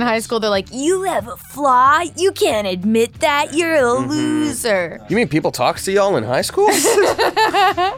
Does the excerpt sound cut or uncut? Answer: cut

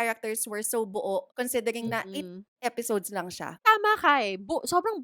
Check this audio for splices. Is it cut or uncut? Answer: cut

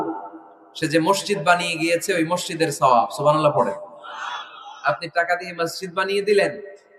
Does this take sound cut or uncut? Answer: uncut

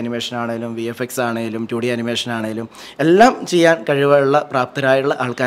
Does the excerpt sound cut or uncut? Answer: uncut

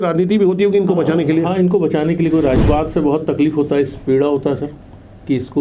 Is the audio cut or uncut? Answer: cut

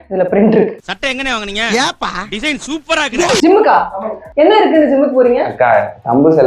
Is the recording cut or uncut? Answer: cut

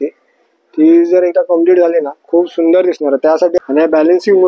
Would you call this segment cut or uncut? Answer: cut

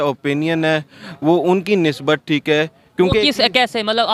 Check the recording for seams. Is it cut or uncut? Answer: uncut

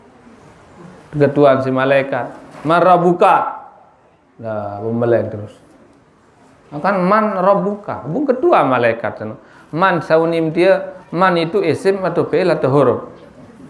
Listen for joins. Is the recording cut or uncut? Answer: uncut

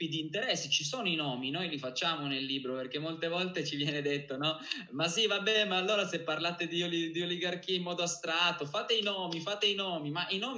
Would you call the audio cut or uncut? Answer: uncut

